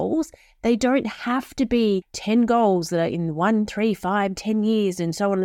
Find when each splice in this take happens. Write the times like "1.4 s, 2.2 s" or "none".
2.1 s